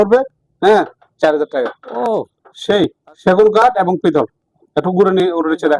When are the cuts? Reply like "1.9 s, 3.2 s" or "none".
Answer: 1.8 s